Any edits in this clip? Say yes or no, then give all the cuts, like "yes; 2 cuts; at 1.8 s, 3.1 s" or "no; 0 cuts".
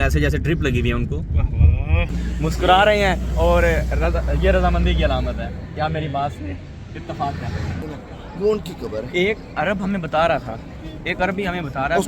yes; 2 cuts; at 2.1 s, 7.9 s